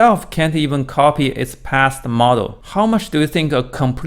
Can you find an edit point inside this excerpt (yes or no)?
yes